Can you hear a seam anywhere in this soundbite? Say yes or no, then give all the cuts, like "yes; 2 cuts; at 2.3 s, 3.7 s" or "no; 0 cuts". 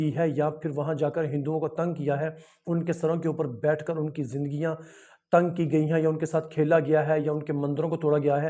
no; 0 cuts